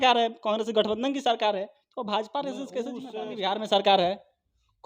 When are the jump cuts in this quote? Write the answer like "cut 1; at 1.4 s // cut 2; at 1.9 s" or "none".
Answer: cut 1; at 3.1 s